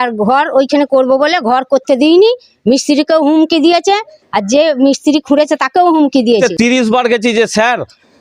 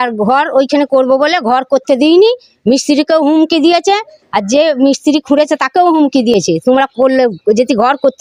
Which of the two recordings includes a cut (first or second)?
first